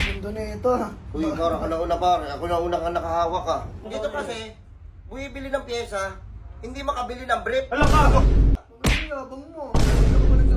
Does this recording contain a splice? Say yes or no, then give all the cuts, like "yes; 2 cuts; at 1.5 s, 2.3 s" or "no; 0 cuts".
yes; 2 cuts; at 3.8 s, 8.6 s